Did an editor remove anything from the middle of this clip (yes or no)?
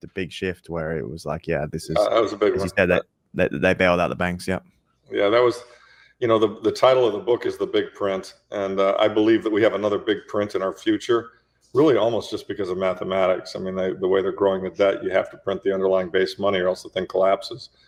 no